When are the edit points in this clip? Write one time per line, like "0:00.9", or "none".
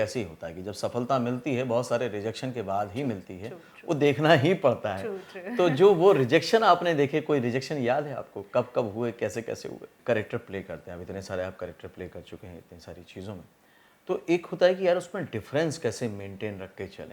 0:10.0